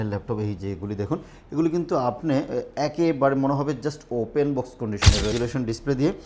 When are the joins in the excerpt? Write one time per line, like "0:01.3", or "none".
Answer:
0:05.3